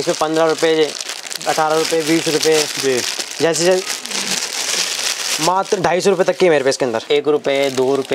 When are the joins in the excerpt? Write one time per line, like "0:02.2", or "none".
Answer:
0:07.0

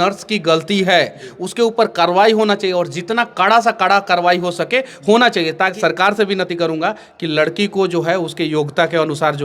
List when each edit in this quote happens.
0:05.7

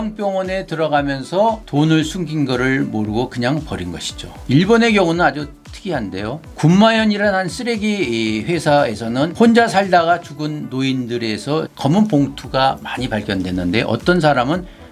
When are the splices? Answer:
0:11.7

